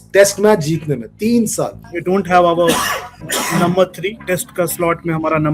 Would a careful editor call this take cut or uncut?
cut